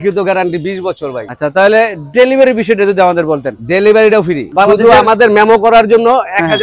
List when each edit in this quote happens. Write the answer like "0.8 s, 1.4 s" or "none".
1.2 s, 4.4 s